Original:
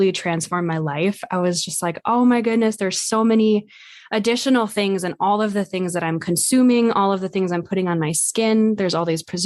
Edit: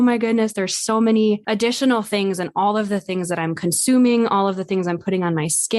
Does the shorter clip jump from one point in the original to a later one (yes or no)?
yes